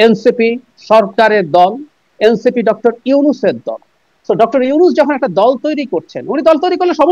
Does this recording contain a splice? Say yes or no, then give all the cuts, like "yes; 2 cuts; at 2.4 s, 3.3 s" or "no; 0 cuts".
no; 0 cuts